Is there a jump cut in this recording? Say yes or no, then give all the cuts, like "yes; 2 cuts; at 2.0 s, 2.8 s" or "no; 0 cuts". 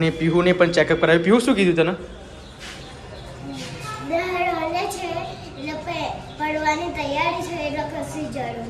no; 0 cuts